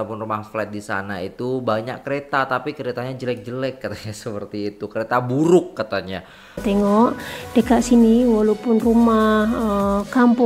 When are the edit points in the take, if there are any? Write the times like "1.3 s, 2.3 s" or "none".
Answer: 6.6 s